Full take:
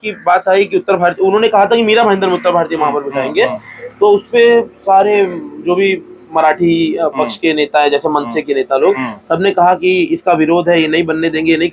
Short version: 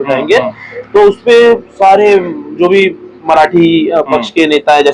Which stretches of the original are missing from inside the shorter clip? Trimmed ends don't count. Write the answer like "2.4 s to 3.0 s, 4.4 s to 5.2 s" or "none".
none